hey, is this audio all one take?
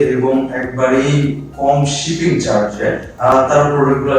no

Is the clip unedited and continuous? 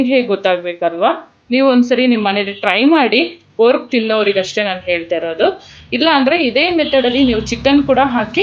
yes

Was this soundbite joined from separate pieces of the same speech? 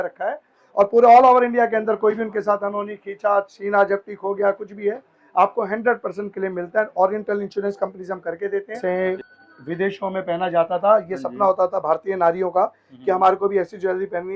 yes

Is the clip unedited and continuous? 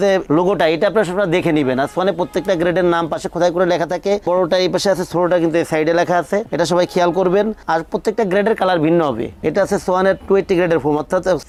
yes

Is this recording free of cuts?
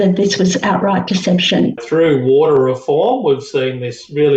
no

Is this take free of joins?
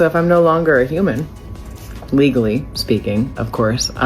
yes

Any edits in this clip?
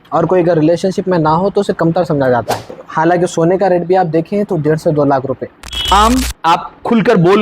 yes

